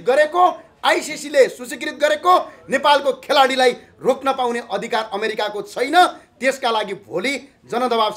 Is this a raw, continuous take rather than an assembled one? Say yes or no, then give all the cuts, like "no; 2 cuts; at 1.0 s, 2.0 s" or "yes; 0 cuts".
yes; 0 cuts